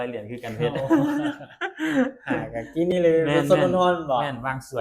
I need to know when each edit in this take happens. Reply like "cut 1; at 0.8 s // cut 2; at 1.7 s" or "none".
none